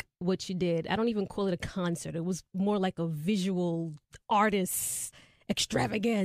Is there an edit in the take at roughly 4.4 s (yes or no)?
no